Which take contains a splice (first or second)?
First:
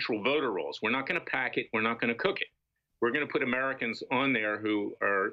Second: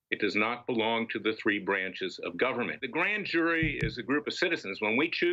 second